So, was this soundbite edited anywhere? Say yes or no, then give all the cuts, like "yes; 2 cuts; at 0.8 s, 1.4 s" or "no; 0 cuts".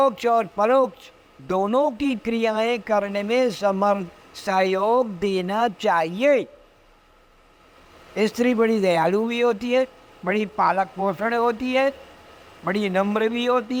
no; 0 cuts